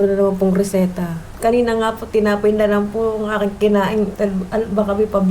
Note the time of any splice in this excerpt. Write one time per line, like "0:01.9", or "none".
0:01.3
0:04.1